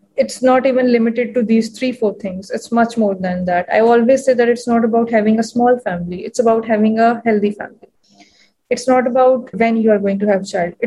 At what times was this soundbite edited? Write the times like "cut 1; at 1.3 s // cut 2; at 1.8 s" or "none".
cut 1; at 9.5 s